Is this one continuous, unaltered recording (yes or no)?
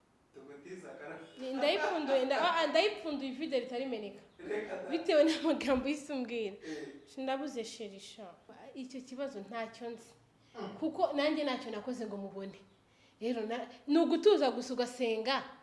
no